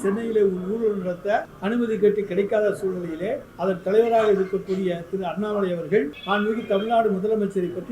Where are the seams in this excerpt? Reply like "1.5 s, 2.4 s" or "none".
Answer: 1.5 s, 3.5 s, 6.2 s